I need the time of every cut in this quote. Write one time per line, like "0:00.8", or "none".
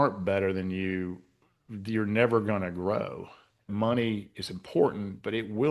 0:03.7